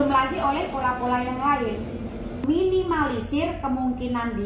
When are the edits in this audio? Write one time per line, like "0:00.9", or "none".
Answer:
0:02.4